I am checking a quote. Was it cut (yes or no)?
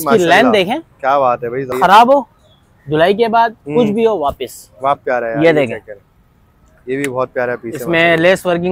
yes